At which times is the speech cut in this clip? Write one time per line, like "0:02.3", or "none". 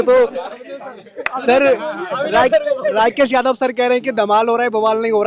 none